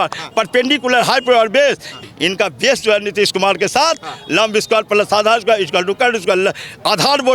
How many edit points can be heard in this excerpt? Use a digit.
1